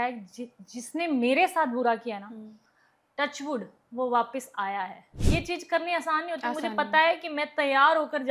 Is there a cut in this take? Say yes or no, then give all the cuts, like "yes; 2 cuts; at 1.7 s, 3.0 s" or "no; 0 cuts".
yes; 1 cut; at 5.1 s